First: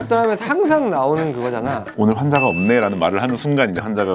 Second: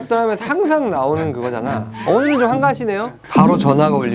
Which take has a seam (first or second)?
first